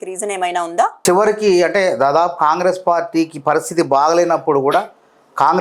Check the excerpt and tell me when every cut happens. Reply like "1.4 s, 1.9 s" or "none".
1.0 s